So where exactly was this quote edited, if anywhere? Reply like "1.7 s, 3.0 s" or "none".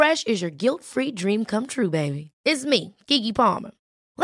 none